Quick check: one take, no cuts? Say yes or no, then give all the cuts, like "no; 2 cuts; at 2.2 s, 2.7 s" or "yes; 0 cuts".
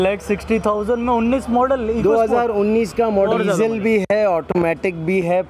no; 1 cut; at 3.3 s